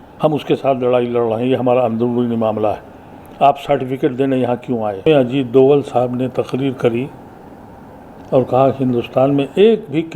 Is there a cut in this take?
yes; 1 cut; at 5.1 s

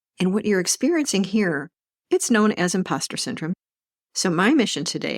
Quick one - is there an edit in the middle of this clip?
yes; 1 cut; at 3.5 s

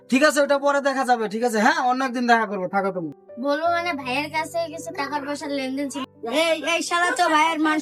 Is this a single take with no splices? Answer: no; 1 cut; at 3.3 s

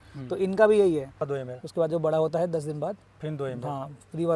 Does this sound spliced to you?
yes; 1 cut; at 1.3 s

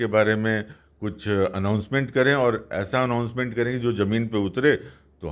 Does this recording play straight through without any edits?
yes; 0 cuts

